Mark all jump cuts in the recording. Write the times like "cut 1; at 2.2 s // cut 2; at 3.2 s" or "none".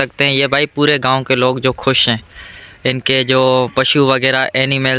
none